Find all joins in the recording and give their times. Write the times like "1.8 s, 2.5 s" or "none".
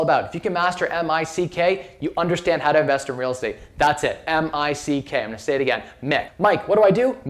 6.3 s